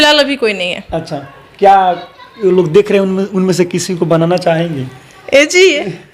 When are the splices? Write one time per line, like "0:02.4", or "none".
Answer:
none